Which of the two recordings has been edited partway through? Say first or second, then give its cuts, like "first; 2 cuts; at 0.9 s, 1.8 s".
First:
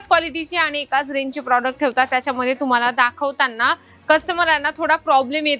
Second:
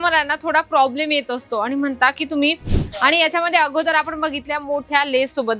second; 1 cut; at 2.7 s